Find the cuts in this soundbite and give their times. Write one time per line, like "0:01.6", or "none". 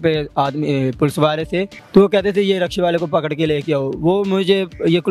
0:01.8